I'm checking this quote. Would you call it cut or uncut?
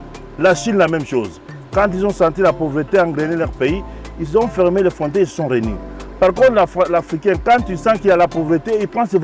uncut